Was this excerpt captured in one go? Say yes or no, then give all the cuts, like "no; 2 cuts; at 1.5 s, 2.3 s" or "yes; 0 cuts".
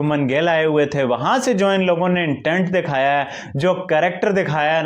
yes; 0 cuts